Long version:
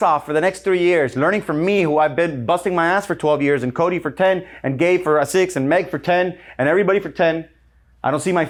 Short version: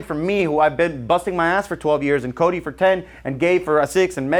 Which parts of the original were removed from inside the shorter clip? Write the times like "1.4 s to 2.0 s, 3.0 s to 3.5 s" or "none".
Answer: none